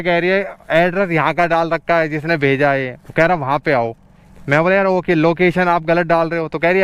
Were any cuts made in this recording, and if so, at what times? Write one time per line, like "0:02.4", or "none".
none